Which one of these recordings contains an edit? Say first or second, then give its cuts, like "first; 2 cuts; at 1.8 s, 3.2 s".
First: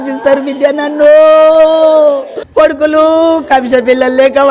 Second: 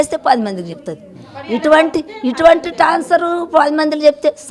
first; 1 cut; at 2.3 s